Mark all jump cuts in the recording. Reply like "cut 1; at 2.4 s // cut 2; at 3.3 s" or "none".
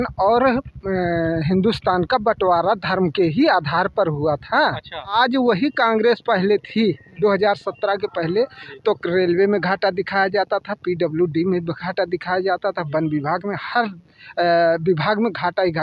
cut 1; at 5.1 s